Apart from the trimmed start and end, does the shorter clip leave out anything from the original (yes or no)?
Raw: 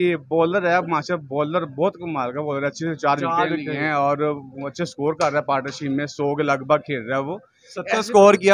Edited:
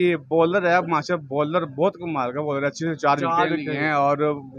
no